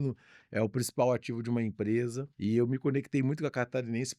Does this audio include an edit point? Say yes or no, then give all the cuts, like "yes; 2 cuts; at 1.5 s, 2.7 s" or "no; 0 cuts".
yes; 1 cut; at 2.2 s